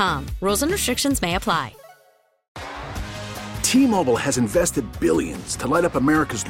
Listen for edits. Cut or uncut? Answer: cut